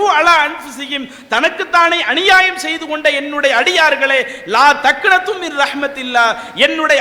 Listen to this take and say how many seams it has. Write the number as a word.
zero